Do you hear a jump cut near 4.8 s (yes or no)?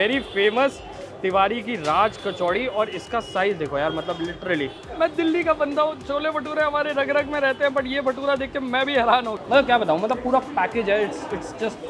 yes